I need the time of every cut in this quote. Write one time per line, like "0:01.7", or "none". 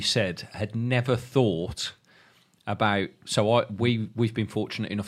none